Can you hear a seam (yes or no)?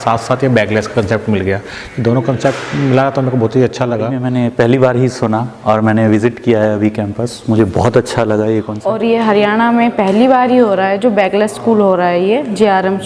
yes